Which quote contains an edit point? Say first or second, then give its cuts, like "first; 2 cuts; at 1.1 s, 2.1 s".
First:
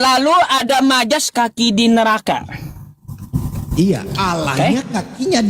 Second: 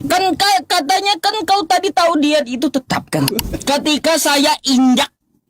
second; 1 cut; at 3.3 s